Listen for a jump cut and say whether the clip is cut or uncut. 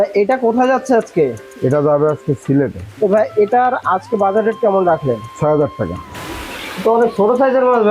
cut